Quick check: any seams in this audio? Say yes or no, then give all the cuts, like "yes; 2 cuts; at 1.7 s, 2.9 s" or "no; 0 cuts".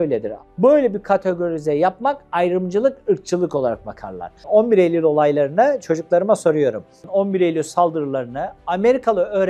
yes; 1 cut; at 4.3 s